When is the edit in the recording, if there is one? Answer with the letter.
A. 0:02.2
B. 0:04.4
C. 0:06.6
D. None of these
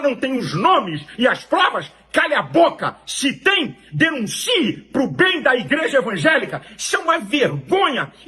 B